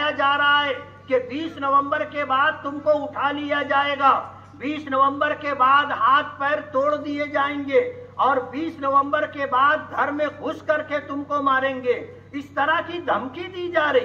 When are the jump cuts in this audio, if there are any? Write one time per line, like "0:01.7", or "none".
none